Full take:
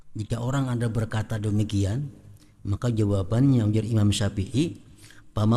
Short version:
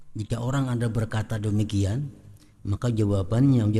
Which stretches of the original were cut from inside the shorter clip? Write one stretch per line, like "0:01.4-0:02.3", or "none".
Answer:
none